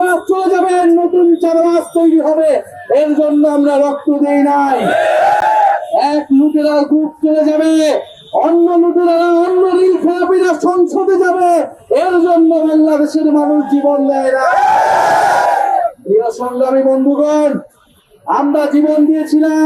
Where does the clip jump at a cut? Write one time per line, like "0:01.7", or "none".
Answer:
none